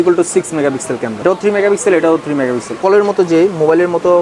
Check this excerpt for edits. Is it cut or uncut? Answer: cut